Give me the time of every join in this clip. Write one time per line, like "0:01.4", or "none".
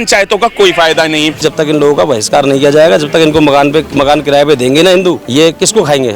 0:01.4
0:03.9
0:05.2